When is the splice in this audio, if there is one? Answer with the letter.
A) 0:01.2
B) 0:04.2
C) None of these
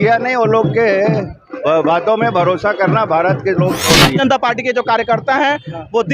B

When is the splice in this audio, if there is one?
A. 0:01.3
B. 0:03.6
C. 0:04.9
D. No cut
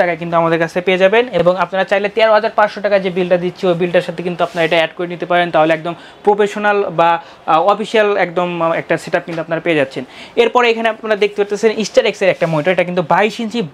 D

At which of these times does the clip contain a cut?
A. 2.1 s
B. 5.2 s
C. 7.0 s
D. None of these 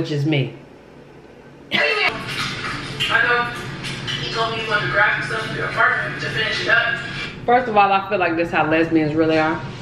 A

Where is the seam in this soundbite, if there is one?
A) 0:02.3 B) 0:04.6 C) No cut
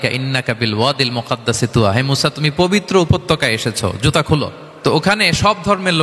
B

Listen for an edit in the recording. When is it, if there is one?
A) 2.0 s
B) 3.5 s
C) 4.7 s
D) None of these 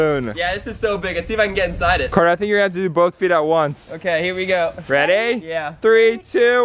A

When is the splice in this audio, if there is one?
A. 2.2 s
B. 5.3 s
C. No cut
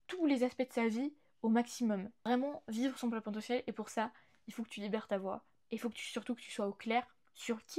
A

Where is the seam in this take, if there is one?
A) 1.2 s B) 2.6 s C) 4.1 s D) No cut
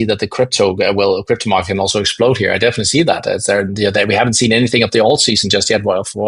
D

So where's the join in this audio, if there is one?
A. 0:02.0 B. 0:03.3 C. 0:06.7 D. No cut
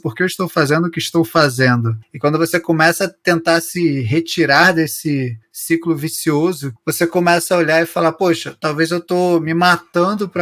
C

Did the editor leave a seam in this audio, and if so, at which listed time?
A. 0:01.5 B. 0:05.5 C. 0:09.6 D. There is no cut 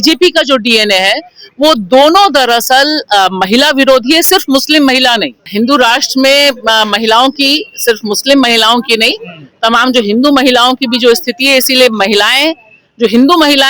B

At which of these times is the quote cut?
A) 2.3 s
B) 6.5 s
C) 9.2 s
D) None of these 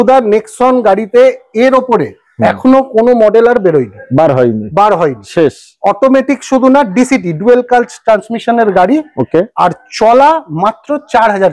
D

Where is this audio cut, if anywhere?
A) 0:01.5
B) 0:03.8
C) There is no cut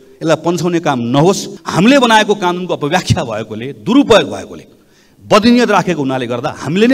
A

